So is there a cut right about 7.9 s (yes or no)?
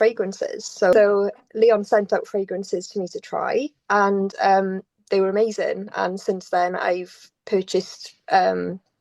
no